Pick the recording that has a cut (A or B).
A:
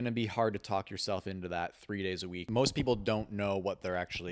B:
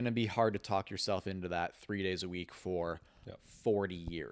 A